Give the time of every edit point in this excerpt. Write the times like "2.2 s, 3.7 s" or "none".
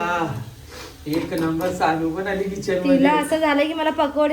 none

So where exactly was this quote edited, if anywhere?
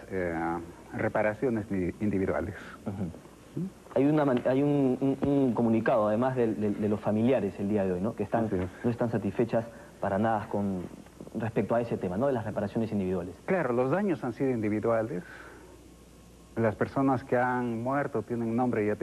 6.2 s

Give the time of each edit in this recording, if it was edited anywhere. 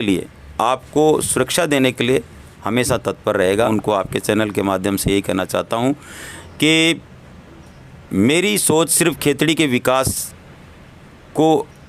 3.7 s

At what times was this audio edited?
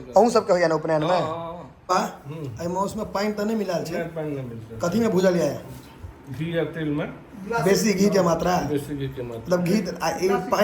1.7 s

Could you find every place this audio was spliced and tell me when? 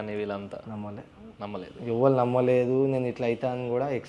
none

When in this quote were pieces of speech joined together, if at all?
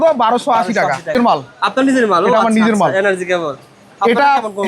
1.1 s

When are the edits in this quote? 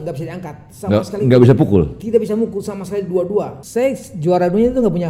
3.6 s

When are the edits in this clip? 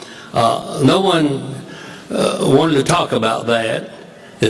2.4 s

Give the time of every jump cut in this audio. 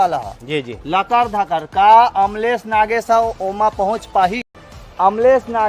4.4 s

